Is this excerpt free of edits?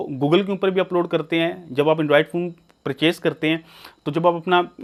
yes; 0 cuts

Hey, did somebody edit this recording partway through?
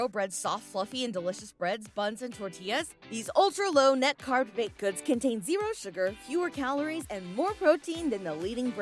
no; 0 cuts

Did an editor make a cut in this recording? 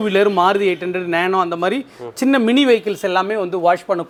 no; 0 cuts

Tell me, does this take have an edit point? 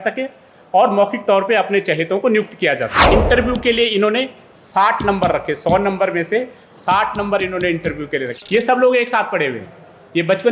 yes; 2 cuts; at 3.0 s, 8.3 s

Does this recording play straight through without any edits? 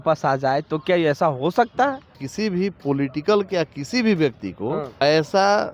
no; 2 cuts; at 2.2 s, 4.9 s

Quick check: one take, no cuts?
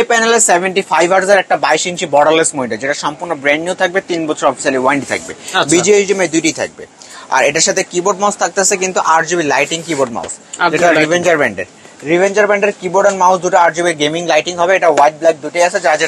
yes; 0 cuts

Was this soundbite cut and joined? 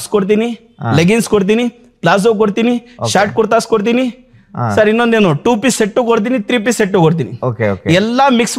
no; 0 cuts

